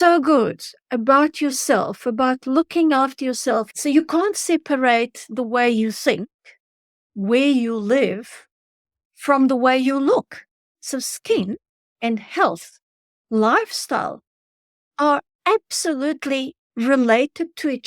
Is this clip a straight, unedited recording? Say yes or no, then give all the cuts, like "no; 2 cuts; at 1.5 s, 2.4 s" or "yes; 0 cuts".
no; 1 cut; at 3.7 s